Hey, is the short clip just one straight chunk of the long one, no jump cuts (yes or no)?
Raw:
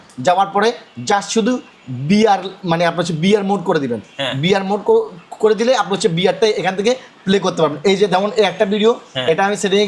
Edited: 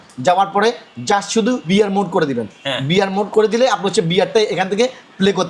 no